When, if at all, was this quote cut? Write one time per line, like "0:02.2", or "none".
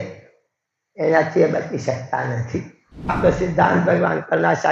0:03.2